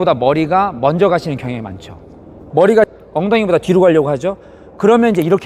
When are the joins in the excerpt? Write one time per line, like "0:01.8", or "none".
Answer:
0:02.3
0:03.0